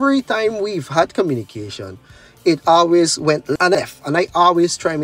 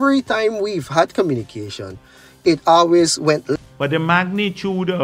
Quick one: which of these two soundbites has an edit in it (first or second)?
second